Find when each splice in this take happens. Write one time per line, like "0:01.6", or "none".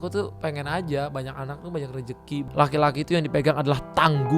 0:02.5